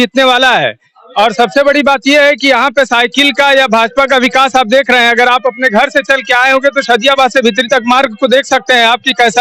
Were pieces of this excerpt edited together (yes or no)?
no